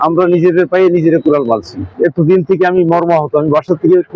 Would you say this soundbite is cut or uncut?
cut